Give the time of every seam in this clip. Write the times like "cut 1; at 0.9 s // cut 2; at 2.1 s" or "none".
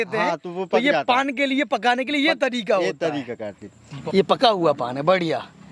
cut 1; at 3.9 s